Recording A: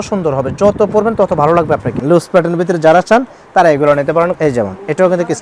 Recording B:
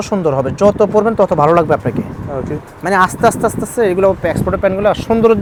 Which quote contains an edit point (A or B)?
A